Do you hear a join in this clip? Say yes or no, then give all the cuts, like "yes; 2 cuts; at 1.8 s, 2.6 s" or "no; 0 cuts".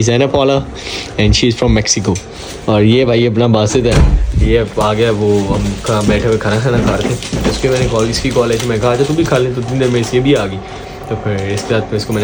no; 0 cuts